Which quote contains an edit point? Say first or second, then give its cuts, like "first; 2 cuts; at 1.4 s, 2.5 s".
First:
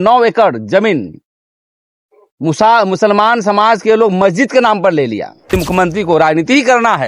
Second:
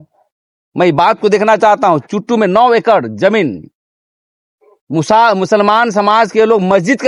first; 1 cut; at 5.5 s